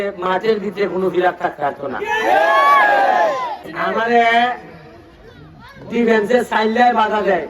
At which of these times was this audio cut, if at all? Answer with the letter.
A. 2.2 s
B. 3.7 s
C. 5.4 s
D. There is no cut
B